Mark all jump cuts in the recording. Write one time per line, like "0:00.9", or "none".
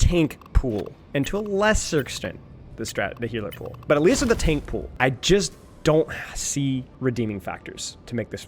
0:04.8
0:06.9

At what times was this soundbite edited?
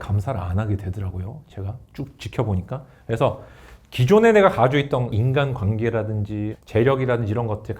0:05.1
0:06.5

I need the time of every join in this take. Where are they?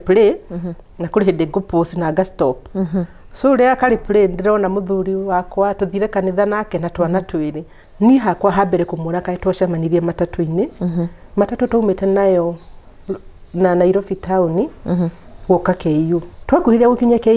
0:07.8
0:16.3

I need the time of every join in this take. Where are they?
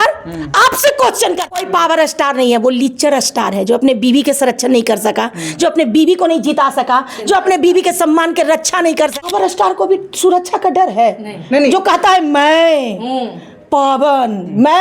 0:01.6
0:09.2

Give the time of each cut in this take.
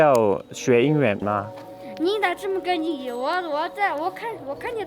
0:01.2

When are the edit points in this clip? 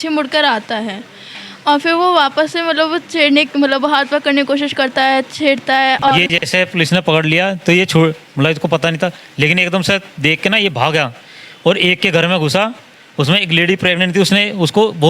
0:06.1

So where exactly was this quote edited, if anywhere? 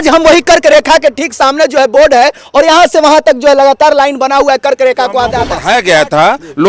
0:05.5

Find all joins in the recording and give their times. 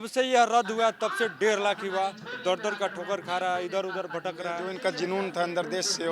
0:04.7

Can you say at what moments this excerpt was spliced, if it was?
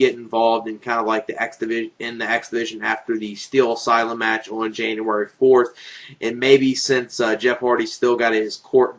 0:06.2

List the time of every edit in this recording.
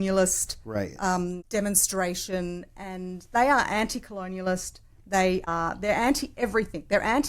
0:01.4
0:05.5

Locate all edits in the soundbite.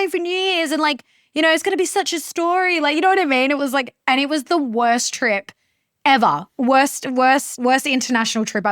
0:07.5

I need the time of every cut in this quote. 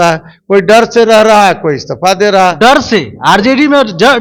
none

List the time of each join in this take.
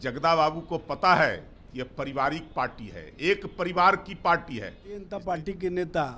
0:05.1

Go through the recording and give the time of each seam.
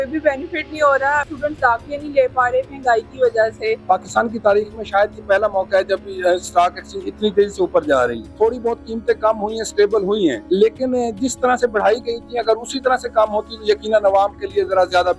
0:01.3
0:03.8
0:08.2
0:10.4

